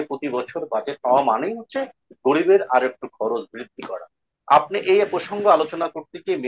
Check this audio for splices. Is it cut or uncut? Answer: uncut